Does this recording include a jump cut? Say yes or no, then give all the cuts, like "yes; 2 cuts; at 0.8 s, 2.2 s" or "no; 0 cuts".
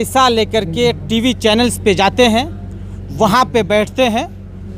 no; 0 cuts